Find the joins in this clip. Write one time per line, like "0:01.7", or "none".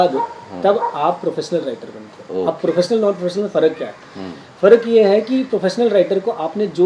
none

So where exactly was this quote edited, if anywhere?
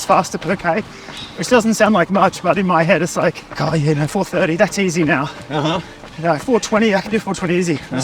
0:03.5

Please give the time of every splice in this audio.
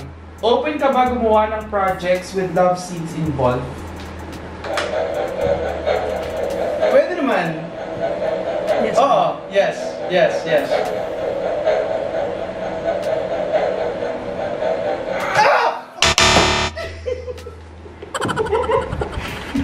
none

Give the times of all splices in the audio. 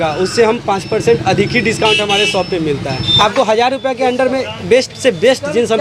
0:03.0

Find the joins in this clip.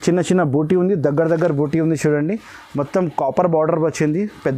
none

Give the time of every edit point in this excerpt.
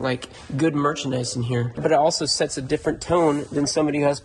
none

